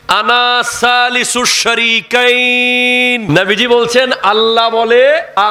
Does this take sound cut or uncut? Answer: uncut